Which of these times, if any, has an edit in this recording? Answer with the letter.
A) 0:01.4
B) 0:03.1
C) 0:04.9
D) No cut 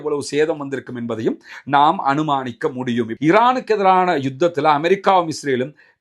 B